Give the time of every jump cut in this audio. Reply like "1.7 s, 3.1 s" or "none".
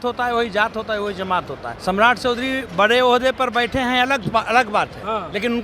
1.6 s